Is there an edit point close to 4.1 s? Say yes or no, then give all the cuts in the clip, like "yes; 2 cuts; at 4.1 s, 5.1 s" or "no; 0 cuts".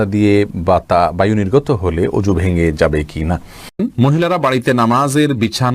yes; 1 cut; at 4.1 s